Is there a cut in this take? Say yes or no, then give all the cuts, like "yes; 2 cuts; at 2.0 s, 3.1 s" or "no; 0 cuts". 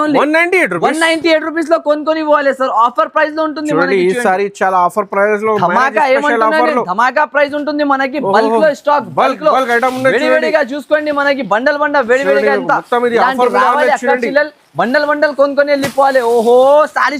no; 0 cuts